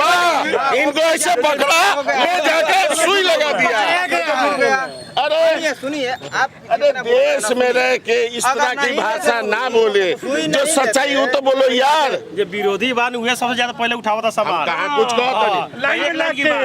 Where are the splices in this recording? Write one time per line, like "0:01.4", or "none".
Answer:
none

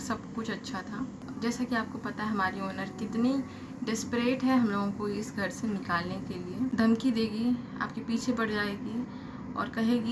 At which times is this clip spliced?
0:01.2
0:06.7

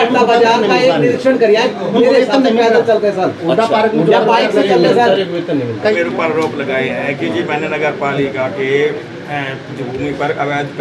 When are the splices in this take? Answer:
0:05.9

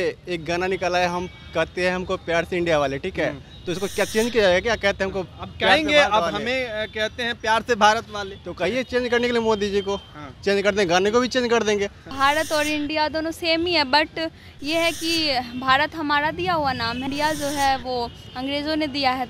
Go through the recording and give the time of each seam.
0:12.1
0:17.1

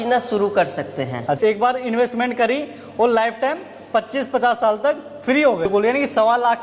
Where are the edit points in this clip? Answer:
0:01.4
0:05.7

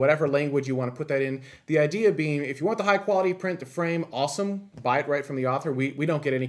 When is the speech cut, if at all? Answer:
none

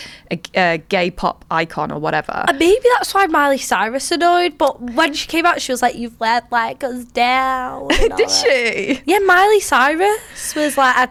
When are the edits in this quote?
none

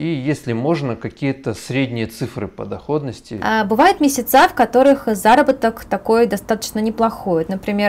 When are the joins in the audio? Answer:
0:03.4

